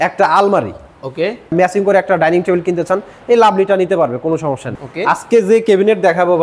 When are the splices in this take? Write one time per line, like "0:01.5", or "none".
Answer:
0:01.5
0:04.7